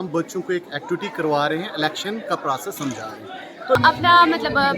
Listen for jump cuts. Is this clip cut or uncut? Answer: cut